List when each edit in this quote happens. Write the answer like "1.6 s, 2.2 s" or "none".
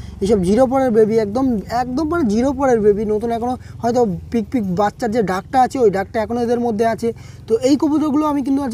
none